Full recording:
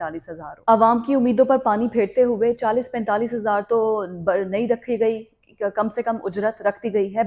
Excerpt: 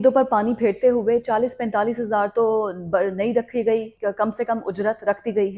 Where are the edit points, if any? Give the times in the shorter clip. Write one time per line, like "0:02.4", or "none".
0:03.9